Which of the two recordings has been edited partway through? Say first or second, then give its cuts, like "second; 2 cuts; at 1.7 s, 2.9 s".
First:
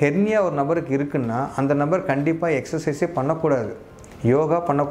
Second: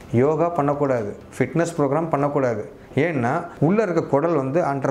second; 1 cut; at 3.5 s